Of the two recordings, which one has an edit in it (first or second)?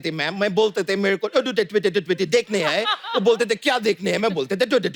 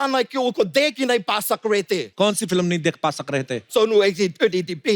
second